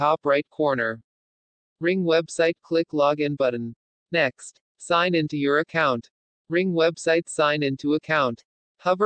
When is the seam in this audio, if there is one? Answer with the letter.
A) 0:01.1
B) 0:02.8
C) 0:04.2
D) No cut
C